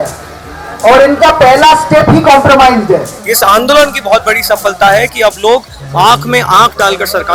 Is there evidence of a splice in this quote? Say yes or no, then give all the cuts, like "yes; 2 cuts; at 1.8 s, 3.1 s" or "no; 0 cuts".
yes; 1 cut; at 3.2 s